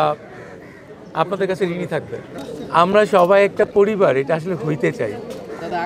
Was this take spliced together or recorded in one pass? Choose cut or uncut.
cut